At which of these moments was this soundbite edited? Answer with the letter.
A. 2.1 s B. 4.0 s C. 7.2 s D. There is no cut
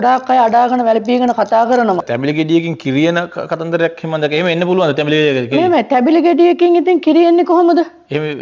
A